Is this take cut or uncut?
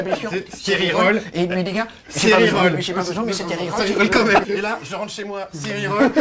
cut